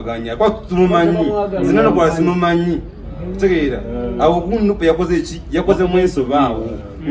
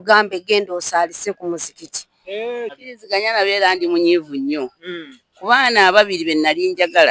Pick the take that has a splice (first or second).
second